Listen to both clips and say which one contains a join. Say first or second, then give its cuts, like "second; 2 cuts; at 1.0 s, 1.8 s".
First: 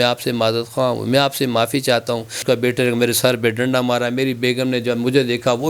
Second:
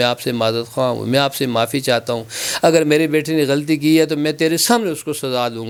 first; 1 cut; at 2.4 s